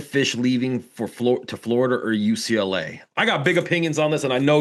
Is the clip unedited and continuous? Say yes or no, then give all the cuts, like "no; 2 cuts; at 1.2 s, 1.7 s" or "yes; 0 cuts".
yes; 0 cuts